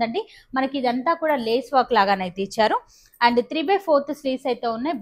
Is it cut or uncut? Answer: uncut